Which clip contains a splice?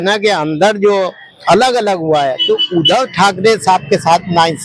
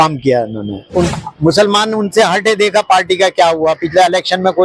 second; 1 cut; at 1.1 s

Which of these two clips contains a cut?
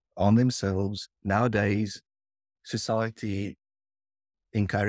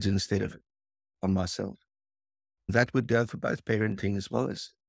second; 1 cut; at 2.7 s

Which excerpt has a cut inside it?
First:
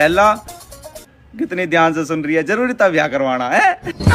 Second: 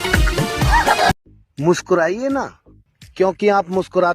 second; 1 cut; at 1.2 s

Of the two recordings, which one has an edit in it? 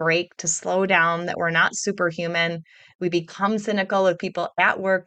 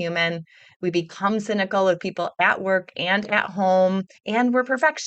second; 1 cut; at 4.1 s

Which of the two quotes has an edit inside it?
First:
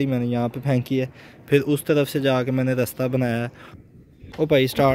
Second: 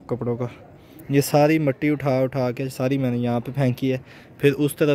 first; 1 cut; at 3.7 s

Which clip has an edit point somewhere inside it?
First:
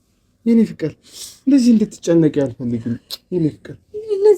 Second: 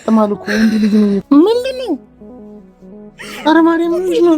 second; 1 cut; at 1.2 s

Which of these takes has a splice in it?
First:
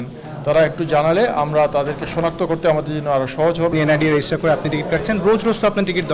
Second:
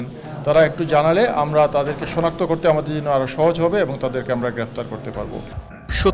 first; 1 cut; at 3.7 s

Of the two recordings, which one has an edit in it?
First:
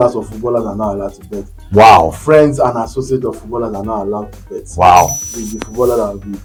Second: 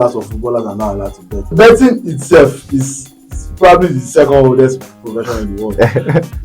second; 1 cut; at 1.5 s

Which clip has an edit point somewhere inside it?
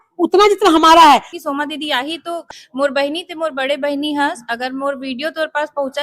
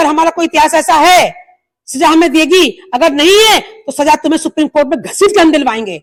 first; 2 cuts; at 1.3 s, 2.5 s

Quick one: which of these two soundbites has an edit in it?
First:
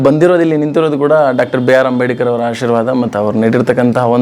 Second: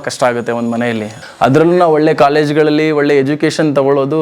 second; 1 cut; at 1.2 s

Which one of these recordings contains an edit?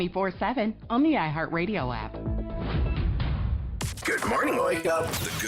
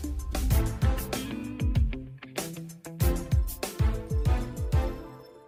first; 1 cut; at 3.7 s

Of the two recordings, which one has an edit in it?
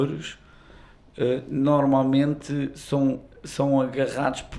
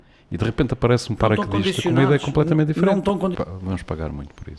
second; 1 cut; at 3.3 s

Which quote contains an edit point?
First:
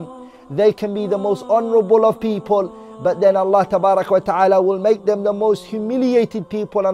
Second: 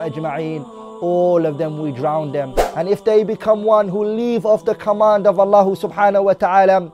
second; 1 cut; at 2.6 s

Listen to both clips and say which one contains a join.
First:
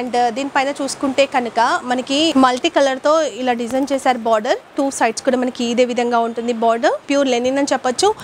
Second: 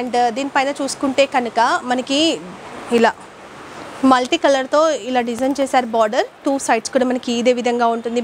first; 2 cuts; at 2.3 s, 7.1 s

